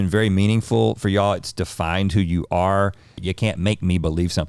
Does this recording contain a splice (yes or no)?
yes